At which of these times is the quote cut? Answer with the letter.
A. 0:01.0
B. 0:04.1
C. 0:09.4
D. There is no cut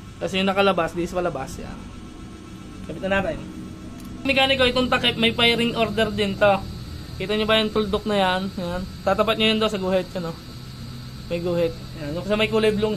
B